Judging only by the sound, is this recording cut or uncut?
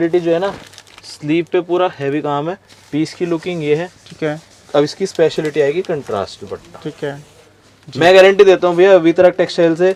uncut